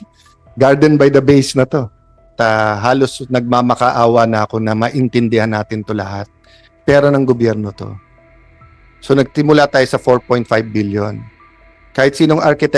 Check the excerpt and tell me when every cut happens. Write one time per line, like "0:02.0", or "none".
0:02.3